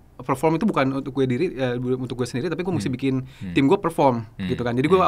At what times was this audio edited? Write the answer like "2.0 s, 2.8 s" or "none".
none